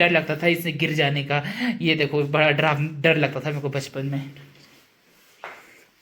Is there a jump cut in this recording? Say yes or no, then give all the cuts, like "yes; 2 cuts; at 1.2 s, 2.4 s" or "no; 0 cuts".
no; 0 cuts